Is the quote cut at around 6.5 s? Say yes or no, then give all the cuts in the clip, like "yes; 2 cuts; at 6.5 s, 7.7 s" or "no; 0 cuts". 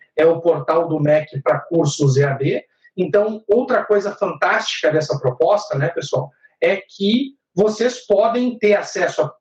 no; 0 cuts